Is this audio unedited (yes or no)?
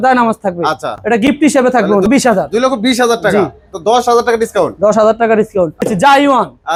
yes